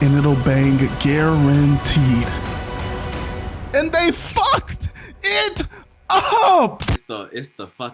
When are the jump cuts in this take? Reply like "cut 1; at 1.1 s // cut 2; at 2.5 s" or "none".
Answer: cut 1; at 6.9 s